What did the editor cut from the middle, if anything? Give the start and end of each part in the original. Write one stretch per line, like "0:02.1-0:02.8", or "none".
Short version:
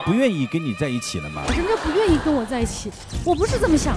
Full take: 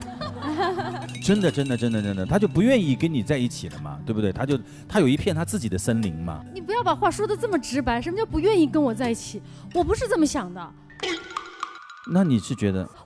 0:04.0-0:08.0